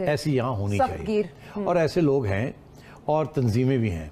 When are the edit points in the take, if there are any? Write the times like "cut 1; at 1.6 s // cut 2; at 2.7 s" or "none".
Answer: none